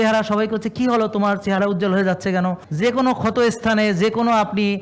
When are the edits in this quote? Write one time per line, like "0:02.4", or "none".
0:02.6